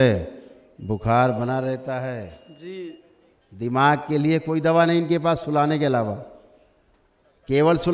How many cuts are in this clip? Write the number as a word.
one